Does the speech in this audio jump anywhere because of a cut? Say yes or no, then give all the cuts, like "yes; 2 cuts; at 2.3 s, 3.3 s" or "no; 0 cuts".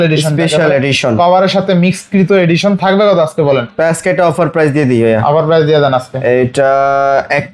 no; 0 cuts